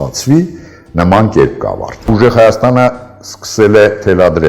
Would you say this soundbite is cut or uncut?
cut